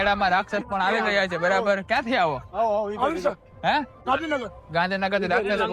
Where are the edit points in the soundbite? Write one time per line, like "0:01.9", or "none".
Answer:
none